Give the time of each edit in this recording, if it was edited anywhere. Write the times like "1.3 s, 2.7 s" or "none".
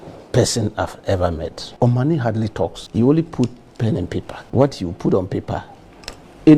1.6 s, 2.8 s, 4.4 s

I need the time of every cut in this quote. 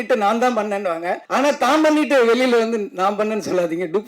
1.2 s

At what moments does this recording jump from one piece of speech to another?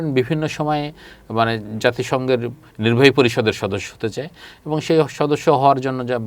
2.6 s

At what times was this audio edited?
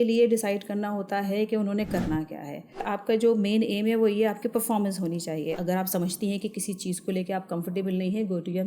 2.9 s, 5.6 s

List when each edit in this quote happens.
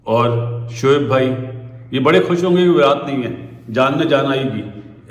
none

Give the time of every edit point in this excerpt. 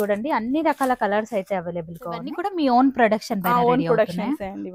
2.4 s

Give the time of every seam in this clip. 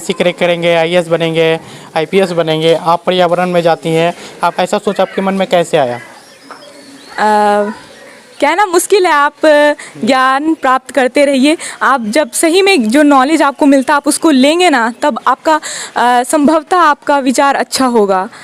4.5 s

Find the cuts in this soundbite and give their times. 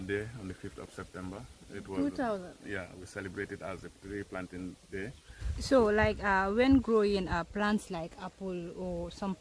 5.7 s

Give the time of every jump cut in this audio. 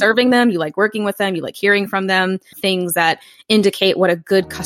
2.5 s

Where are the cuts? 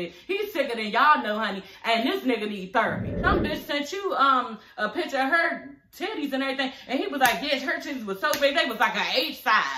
3.1 s

